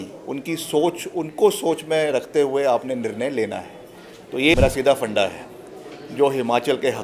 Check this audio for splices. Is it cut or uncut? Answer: cut